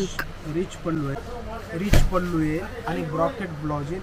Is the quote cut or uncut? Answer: cut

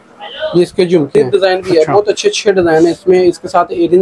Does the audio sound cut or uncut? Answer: cut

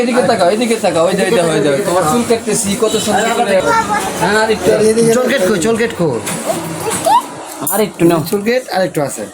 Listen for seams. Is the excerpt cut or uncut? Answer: uncut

